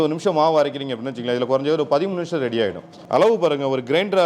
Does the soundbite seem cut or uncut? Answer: cut